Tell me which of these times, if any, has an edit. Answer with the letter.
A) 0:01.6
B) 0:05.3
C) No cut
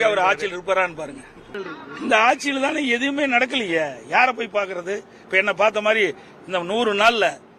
A